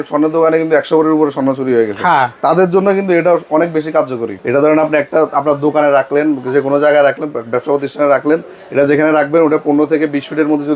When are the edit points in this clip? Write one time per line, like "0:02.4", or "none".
0:04.3